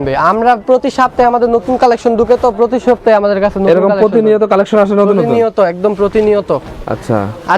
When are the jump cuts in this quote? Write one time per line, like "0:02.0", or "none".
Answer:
none